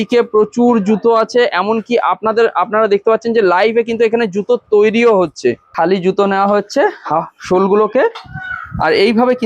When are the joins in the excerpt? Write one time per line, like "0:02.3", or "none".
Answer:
0:05.7

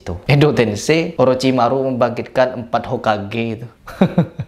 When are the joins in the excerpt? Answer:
none

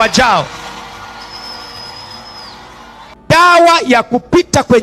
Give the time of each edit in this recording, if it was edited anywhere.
0:03.1

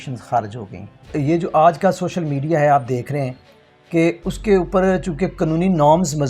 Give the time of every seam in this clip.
0:01.1

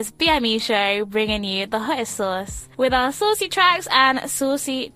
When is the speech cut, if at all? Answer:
none

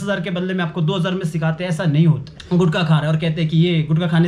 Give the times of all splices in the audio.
0:02.3

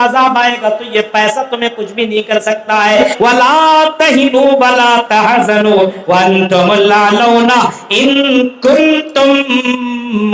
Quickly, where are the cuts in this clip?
0:03.1

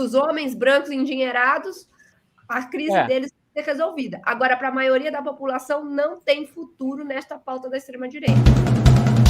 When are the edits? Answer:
0:08.2

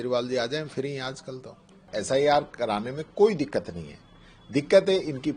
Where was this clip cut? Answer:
0:01.8

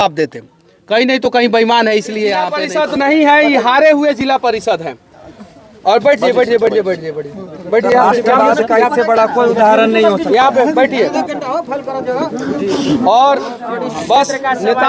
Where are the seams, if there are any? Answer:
0:02.6

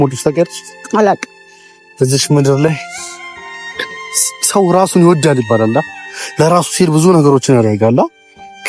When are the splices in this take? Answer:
none

